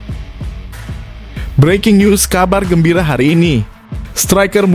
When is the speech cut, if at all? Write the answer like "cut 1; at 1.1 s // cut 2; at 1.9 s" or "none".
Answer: cut 1; at 1.5 s